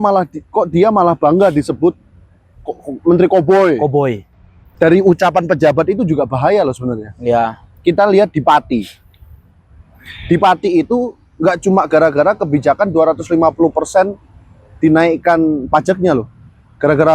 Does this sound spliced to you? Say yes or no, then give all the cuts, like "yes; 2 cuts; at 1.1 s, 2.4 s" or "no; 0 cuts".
yes; 1 cut; at 4.6 s